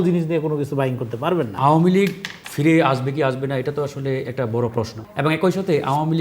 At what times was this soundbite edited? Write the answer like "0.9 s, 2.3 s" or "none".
1.5 s, 5.0 s